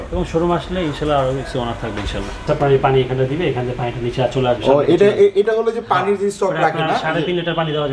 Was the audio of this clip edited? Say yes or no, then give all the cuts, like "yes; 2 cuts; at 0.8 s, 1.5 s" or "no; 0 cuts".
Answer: yes; 1 cut; at 2.4 s